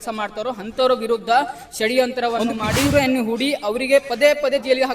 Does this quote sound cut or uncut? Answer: cut